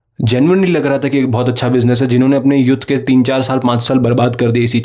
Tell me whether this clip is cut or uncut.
uncut